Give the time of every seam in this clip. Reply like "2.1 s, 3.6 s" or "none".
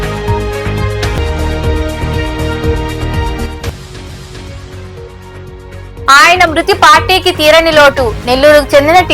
1.1 s